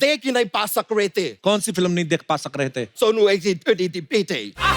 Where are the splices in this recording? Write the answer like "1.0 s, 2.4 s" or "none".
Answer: 1.3 s, 2.9 s